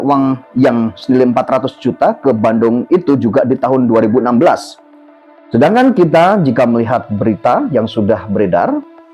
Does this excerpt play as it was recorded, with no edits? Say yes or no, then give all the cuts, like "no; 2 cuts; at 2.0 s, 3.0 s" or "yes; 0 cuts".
yes; 0 cuts